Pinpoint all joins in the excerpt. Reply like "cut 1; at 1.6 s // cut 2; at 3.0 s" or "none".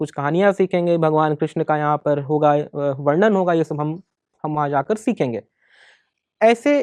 none